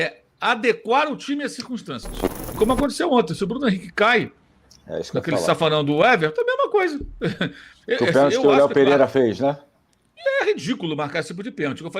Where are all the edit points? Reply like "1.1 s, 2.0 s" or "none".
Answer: 2.5 s